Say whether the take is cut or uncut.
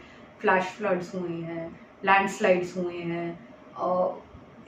uncut